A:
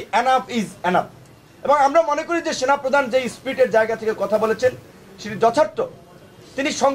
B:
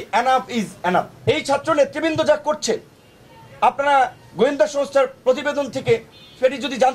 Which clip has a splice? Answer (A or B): B